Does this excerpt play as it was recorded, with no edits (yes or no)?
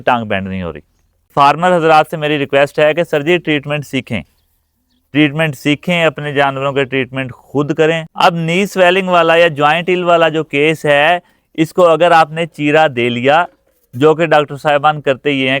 no